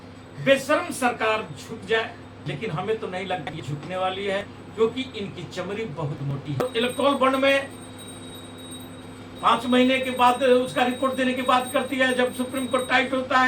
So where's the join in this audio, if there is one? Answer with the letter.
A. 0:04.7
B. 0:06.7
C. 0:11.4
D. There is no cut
B